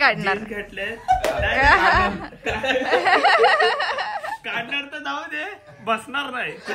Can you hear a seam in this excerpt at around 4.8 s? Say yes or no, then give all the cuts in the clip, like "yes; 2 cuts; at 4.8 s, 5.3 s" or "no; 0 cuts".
no; 0 cuts